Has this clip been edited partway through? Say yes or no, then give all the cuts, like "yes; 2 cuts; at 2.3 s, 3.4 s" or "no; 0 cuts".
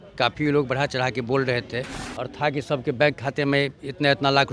yes; 1 cut; at 2.0 s